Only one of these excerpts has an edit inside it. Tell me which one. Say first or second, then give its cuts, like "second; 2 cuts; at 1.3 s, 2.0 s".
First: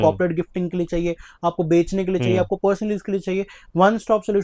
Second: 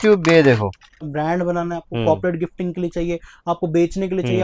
second; 1 cut; at 1.1 s